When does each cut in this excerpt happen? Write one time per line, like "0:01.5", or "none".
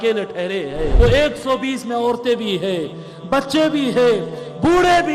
0:00.9